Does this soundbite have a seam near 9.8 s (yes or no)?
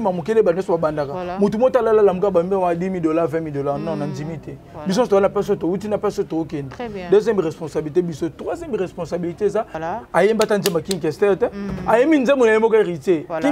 yes